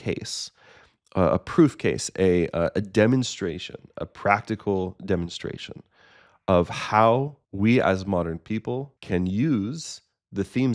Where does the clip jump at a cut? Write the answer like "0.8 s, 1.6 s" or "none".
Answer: 7.4 s, 8.9 s